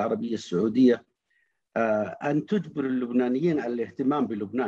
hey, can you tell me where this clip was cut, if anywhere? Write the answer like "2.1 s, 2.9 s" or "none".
none

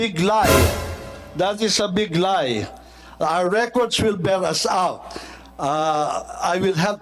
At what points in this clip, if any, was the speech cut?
none

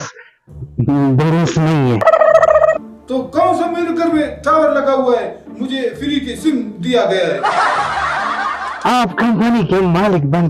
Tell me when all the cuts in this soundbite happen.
none

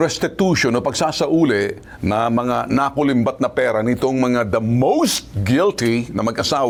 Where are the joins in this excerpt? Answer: none

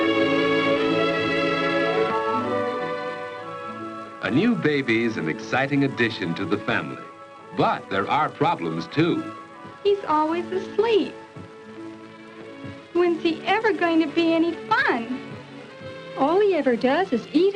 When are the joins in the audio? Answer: 6.8 s

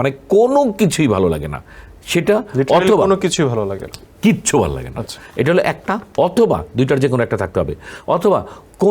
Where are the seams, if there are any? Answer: none

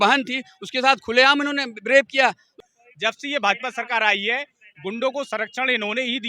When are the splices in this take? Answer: 2.5 s

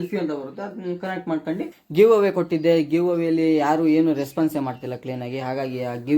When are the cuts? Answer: 1.8 s

